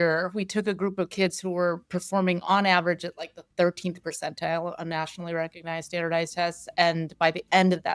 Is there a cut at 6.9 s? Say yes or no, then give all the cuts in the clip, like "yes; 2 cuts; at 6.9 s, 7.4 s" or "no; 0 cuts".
no; 0 cuts